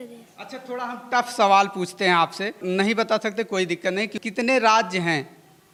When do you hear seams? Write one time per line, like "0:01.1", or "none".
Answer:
none

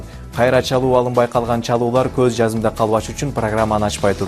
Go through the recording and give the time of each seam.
0:01.3

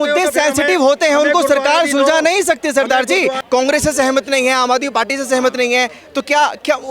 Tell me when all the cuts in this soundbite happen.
0:03.4

